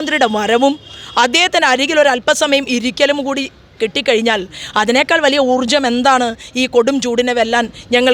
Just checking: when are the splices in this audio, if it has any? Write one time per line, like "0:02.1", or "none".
none